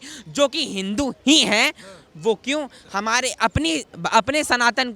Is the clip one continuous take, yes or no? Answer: yes